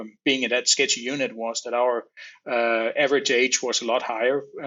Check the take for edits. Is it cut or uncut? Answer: uncut